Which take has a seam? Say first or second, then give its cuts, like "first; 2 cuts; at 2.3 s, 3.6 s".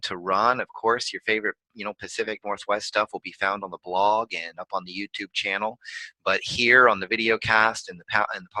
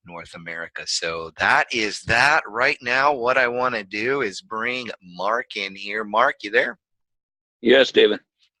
first; 1 cut; at 6.2 s